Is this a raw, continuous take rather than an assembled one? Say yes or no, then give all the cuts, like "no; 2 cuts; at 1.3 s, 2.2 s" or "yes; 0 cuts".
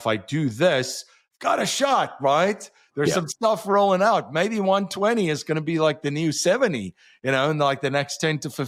yes; 0 cuts